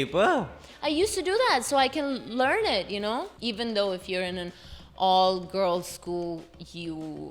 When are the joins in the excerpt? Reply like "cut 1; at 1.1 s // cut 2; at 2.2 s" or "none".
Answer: cut 1; at 3.3 s